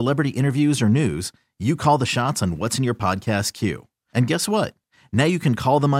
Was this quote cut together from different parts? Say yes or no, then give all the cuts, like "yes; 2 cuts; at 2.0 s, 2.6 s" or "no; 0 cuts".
no; 0 cuts